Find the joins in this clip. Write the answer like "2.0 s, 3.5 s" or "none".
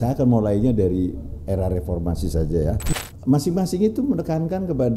2.8 s